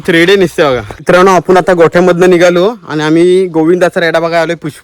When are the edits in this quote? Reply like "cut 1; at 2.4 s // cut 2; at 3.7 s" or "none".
cut 1; at 0.9 s